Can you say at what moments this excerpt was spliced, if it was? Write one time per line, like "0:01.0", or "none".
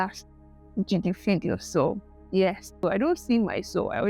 0:02.8